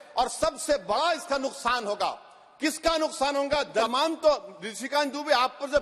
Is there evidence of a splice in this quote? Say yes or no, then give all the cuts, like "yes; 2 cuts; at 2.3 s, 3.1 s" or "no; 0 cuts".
yes; 1 cut; at 3.8 s